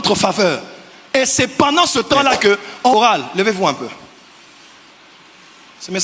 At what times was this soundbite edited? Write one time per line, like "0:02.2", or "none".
0:02.9